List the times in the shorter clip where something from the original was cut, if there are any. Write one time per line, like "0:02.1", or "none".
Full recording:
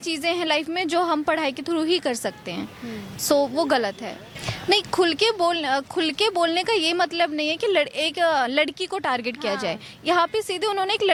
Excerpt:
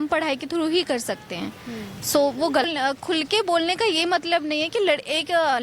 0:02.7